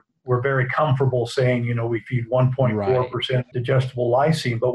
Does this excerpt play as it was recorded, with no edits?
no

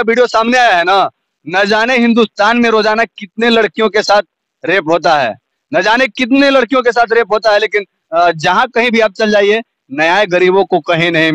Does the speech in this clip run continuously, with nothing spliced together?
yes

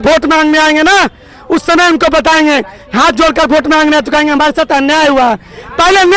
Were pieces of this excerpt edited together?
no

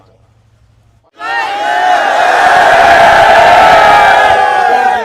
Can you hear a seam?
yes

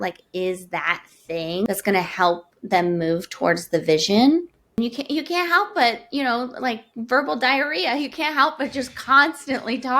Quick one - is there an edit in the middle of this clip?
yes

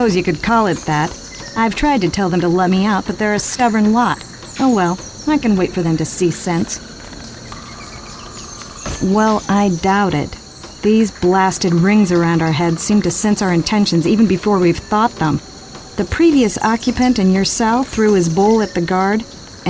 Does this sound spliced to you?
no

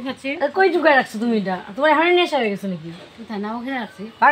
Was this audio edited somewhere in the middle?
no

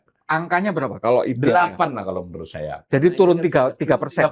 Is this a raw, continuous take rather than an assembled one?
yes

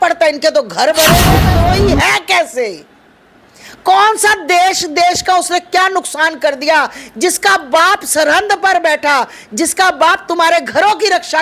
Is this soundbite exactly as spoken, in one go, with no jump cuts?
no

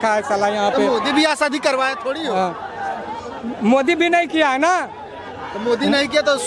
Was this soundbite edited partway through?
no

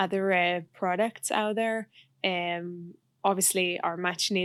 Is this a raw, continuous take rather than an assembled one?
yes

